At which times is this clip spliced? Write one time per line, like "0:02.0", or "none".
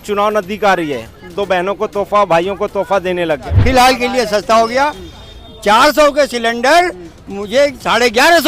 0:03.6